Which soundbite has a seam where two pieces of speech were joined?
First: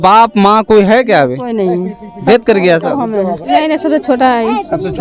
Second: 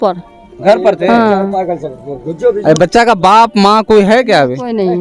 first; 1 cut; at 3.5 s

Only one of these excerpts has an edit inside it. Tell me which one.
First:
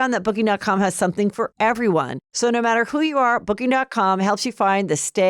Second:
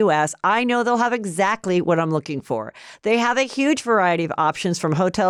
first; 1 cut; at 2.2 s

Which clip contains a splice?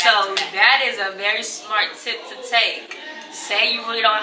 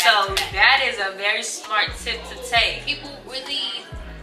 second; 1 cut; at 2.9 s

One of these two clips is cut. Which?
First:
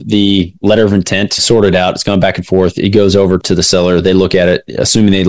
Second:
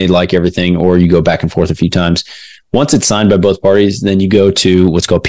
first; 2 cuts; at 1.4 s, 3.4 s

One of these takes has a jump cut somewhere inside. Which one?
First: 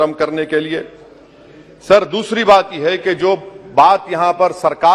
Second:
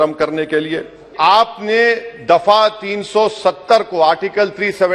second; 1 cut; at 1.1 s

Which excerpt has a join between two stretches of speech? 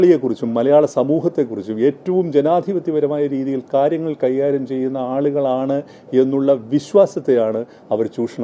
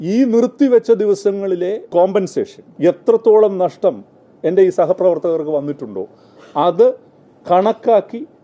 second; 2 cuts; at 1.8 s, 2.6 s

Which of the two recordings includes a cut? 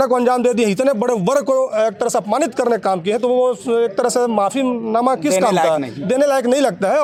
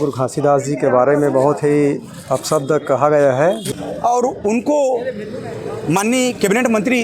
second; 1 cut; at 3.6 s

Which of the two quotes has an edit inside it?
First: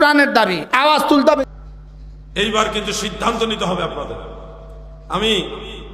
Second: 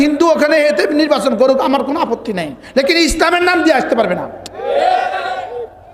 first; 1 cut; at 1.4 s

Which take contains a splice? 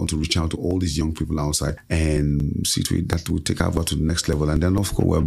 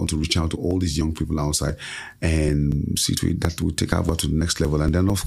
first; 1 cut; at 1.8 s

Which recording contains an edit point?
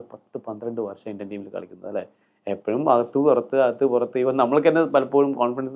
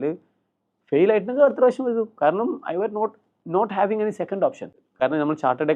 second; 1 cut; at 4.8 s

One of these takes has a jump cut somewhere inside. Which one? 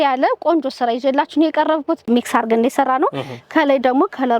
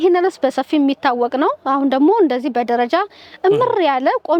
first; 1 cut; at 2.1 s

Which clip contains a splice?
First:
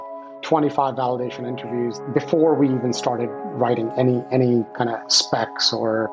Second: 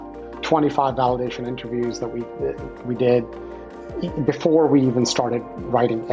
first; 1 cut; at 2.0 s

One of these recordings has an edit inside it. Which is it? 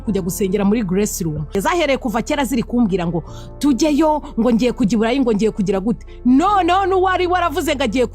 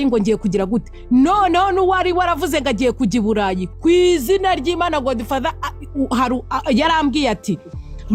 first; 1 cut; at 1.5 s

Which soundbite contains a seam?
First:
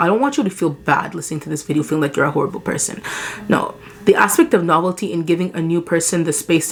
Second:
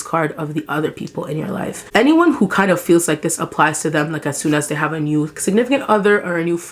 second; 1 cut; at 1.8 s

